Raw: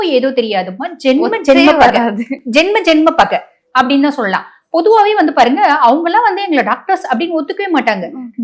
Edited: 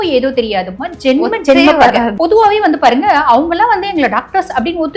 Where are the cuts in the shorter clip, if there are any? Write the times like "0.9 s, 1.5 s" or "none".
2.1 s